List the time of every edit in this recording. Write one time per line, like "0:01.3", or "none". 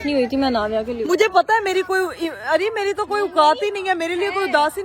none